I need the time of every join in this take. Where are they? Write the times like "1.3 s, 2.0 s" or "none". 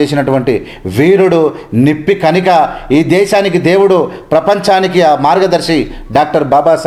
none